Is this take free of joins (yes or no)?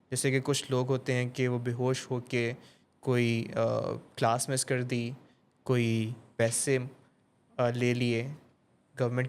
yes